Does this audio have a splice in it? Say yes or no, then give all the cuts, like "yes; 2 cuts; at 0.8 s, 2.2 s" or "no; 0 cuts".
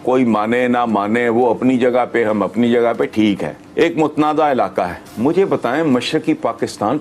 yes; 1 cut; at 3.6 s